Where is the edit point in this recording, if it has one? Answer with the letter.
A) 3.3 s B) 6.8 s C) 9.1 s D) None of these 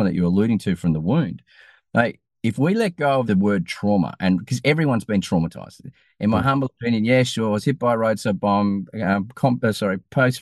A